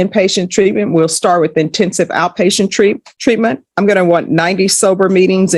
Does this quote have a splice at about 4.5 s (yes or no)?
no